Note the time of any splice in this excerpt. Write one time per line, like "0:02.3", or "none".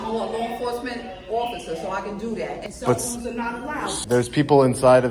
0:02.6
0:04.0